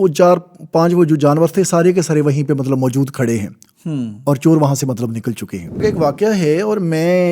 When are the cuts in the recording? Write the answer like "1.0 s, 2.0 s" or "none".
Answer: 5.8 s